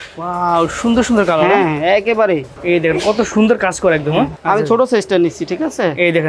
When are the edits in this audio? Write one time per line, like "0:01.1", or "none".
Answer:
0:02.6
0:04.4